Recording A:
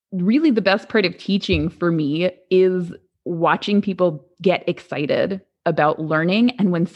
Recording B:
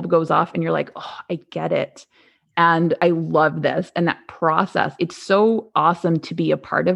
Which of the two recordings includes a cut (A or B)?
B